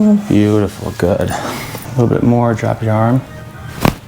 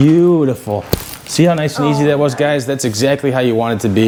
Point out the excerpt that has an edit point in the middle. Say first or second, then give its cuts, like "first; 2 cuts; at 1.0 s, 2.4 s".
first; 1 cut; at 1.8 s